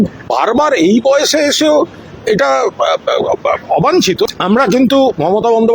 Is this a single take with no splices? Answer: no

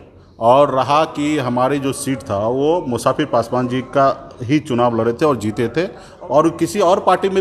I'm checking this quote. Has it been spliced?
yes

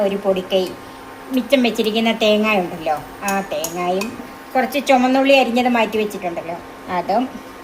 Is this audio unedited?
no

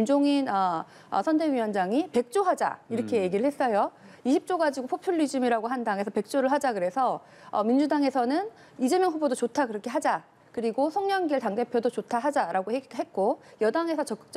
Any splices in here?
no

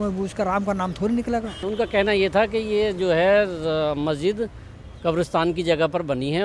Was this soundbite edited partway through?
yes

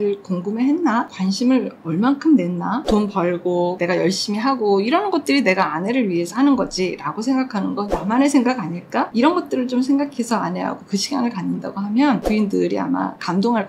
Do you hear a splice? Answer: yes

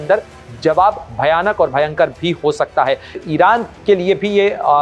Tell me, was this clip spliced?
yes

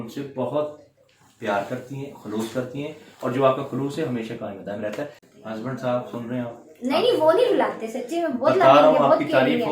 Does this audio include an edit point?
yes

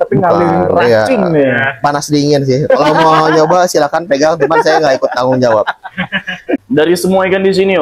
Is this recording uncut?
no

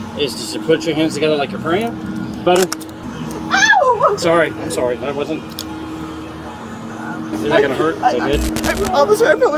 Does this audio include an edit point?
yes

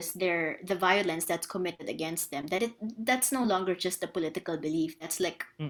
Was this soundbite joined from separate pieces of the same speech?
no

